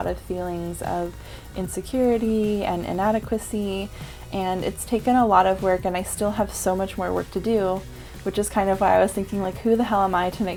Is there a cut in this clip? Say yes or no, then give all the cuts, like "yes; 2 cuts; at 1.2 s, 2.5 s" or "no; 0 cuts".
no; 0 cuts